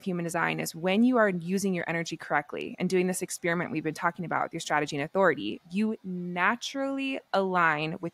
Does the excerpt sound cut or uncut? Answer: uncut